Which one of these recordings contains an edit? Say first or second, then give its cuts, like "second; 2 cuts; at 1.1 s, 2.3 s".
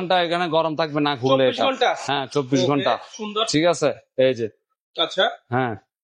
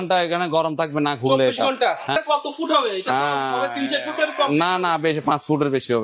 second; 1 cut; at 2.1 s